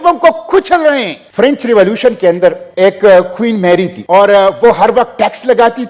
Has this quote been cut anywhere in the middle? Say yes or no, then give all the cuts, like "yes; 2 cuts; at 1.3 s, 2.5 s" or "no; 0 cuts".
yes; 3 cuts; at 1.2 s, 2.7 s, 4.0 s